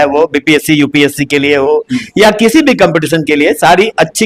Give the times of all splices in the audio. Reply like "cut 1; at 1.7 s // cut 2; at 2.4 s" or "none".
none